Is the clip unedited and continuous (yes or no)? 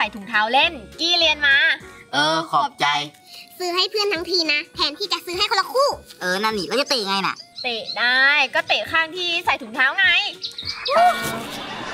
yes